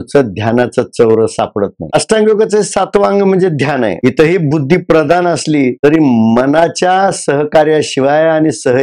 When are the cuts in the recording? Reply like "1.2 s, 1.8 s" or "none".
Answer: 1.9 s, 4.0 s